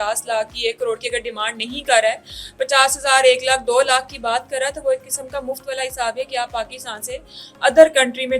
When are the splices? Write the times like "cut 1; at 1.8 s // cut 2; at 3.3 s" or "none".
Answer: none

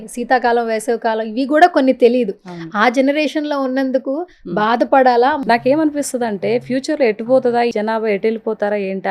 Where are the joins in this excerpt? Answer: cut 1; at 5.4 s // cut 2; at 7.7 s

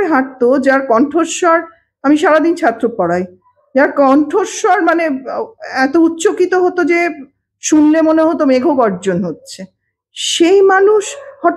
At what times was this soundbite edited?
none

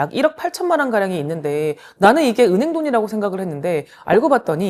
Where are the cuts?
none

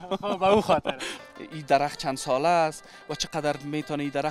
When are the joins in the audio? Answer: cut 1; at 1.1 s

